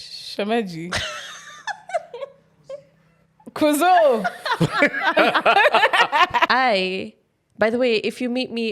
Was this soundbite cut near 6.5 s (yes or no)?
yes